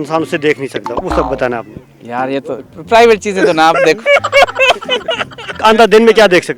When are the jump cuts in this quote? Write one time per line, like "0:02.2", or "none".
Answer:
0:05.6